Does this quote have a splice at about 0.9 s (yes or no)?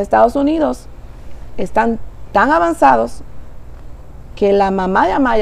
no